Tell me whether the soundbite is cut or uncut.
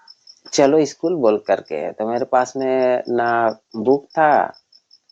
uncut